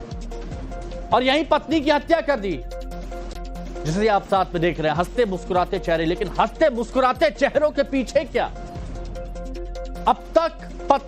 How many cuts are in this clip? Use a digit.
1